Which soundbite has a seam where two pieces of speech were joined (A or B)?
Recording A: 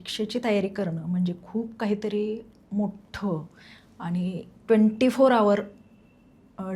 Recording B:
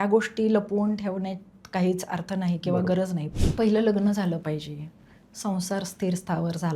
B